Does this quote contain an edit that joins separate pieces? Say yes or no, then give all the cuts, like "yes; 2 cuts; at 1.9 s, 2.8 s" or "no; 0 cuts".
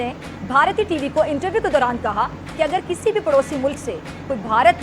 no; 0 cuts